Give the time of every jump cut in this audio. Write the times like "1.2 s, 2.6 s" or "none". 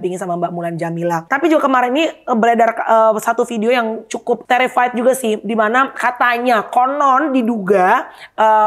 1.2 s, 4.4 s